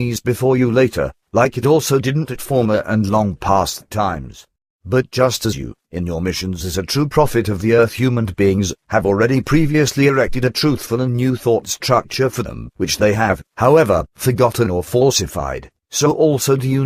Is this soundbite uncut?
no; 1 cut; at 15.5 s

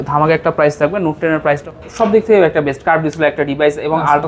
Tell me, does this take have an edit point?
yes; 1 cut; at 1.6 s

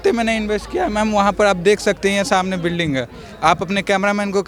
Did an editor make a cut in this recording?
no; 0 cuts

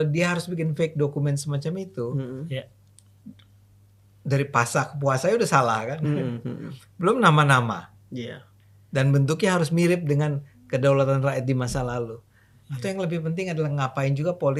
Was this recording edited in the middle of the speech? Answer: no; 0 cuts

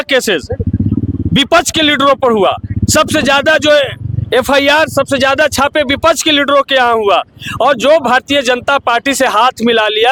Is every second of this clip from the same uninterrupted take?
yes; 0 cuts

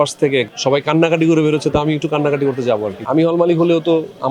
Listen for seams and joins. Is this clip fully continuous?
no; 1 cut; at 3.1 s

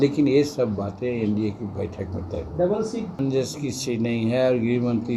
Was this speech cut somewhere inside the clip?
yes; 1 cut; at 3.2 s

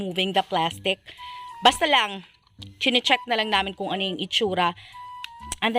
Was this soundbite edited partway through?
no; 0 cuts

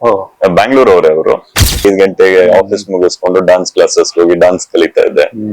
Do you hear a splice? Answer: yes; 1 cut; at 1.8 s

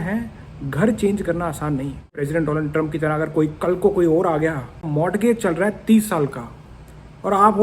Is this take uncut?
no; 2 cuts; at 2.1 s, 4.8 s

